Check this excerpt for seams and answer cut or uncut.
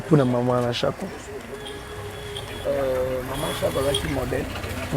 uncut